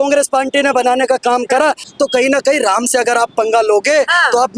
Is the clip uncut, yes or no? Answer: no